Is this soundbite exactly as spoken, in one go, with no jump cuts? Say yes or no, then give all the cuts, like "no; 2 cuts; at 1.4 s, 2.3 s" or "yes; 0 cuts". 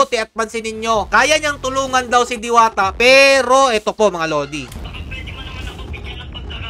no; 1 cut; at 4.8 s